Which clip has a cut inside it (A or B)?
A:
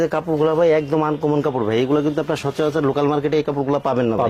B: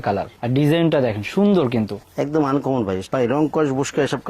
B